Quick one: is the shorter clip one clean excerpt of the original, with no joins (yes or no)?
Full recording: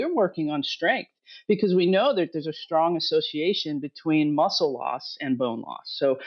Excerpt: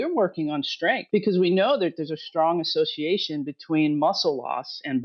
no